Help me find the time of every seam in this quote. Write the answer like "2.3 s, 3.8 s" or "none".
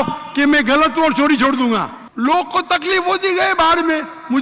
2.0 s